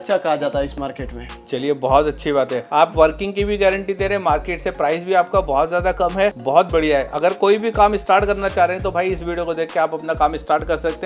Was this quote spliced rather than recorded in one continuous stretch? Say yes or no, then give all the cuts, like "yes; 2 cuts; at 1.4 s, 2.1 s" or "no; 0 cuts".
no; 0 cuts